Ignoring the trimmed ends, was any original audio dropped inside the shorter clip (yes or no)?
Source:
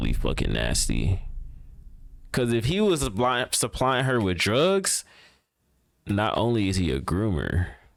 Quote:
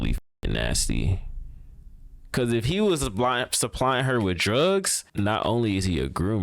yes